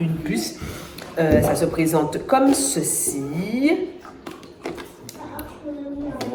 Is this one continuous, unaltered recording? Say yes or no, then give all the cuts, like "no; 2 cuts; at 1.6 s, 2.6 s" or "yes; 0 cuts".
yes; 0 cuts